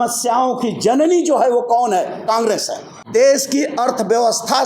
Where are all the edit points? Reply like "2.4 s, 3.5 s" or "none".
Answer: 2.9 s